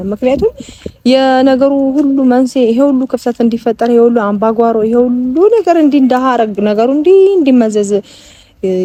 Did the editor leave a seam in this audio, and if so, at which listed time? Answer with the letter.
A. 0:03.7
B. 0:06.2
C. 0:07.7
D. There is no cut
D